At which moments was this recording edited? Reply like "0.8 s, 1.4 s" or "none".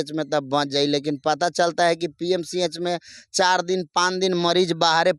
none